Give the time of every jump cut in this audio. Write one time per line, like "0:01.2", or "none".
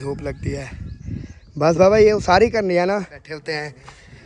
0:03.2